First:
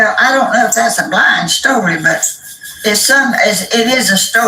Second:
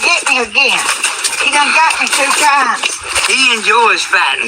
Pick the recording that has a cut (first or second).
second